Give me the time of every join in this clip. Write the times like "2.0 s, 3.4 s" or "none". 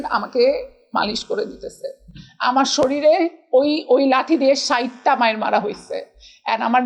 none